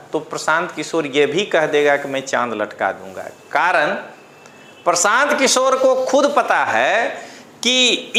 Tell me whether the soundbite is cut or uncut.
uncut